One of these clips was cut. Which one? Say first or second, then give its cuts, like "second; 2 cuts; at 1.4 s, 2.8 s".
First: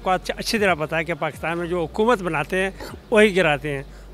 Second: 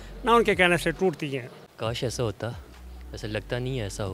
second; 1 cut; at 1.6 s